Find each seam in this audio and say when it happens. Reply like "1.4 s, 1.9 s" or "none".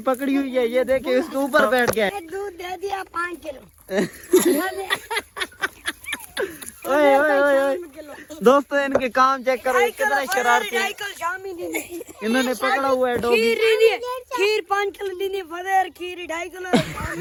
none

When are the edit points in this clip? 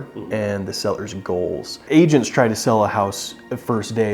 1.8 s

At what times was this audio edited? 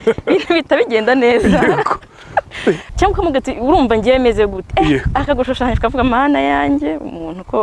2.9 s

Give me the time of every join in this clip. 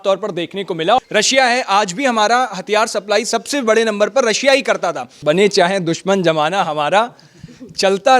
1.0 s, 5.1 s

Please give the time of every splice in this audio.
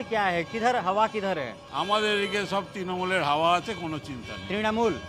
1.6 s

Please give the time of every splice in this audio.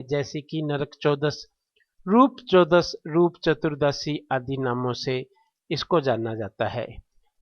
5.0 s

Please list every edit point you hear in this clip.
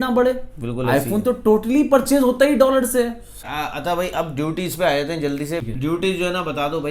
3.3 s, 5.6 s

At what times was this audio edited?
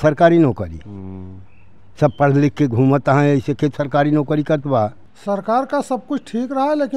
5.1 s

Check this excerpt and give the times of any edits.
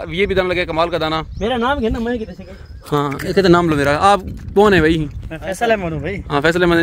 none

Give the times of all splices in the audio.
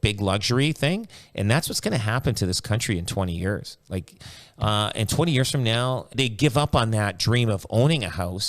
6.1 s

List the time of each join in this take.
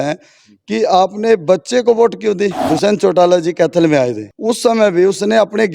2.6 s, 4.3 s

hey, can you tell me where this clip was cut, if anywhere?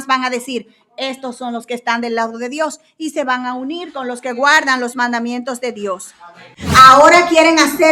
6.4 s

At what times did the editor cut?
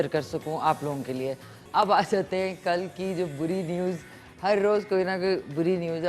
1.6 s

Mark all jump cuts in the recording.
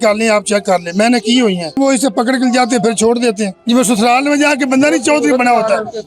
1.8 s, 3.6 s

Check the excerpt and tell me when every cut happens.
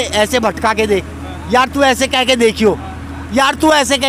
none

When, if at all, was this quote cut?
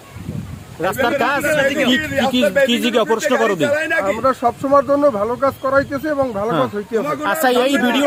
none

